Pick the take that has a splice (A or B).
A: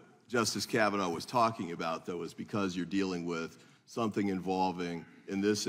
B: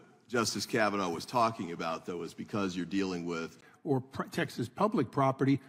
A